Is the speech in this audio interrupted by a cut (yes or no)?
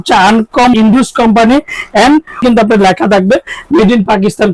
yes